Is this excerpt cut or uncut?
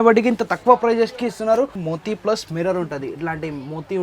cut